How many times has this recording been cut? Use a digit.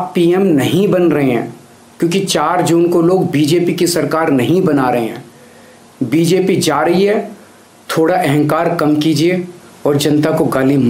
0